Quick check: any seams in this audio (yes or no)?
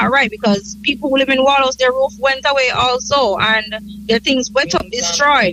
no